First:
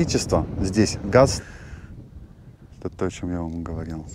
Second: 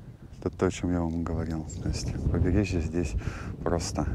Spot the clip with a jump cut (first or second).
first